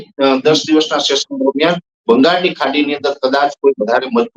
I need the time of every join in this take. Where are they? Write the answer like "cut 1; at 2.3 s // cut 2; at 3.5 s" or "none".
none